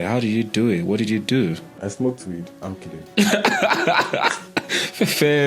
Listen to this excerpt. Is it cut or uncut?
cut